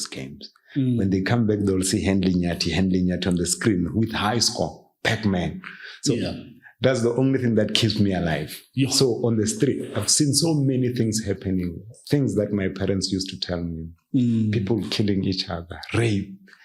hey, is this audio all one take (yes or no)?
yes